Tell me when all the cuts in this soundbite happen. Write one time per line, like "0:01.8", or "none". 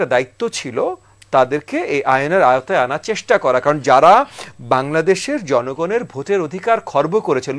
none